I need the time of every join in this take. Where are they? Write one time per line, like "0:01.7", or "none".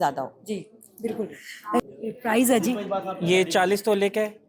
0:01.8